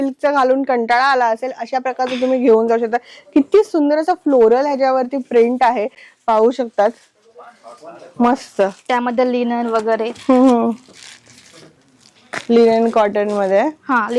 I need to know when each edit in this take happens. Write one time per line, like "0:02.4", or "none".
none